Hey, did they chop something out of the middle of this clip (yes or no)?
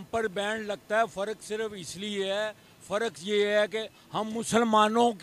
no